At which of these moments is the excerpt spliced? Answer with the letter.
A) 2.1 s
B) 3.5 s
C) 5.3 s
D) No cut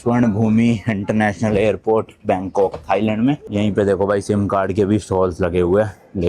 B